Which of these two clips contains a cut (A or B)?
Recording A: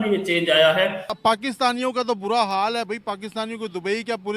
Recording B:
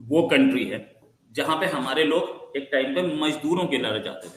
A